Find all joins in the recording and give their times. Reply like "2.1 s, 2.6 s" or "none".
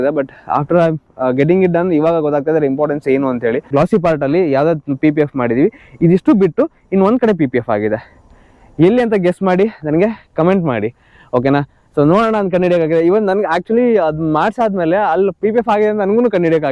3.6 s